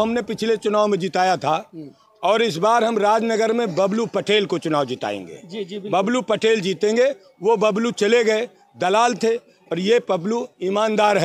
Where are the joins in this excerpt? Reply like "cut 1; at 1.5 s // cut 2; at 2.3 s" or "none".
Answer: none